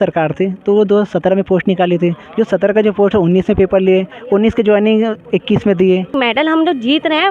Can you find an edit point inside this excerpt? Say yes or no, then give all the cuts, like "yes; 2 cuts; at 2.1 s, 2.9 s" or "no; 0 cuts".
yes; 1 cut; at 6.1 s